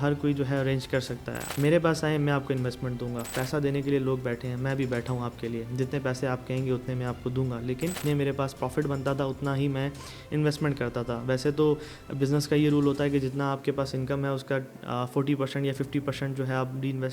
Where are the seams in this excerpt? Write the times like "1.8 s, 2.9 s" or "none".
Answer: 1.4 s, 3.3 s, 8.0 s